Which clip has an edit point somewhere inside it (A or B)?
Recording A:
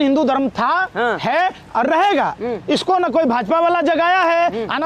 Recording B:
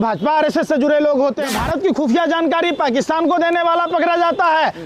B